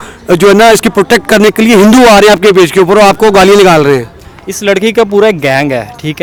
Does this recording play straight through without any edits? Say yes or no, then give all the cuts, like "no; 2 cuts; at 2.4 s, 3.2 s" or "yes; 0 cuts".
yes; 0 cuts